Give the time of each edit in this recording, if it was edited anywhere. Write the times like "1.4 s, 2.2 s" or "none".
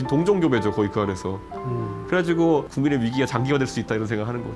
2.7 s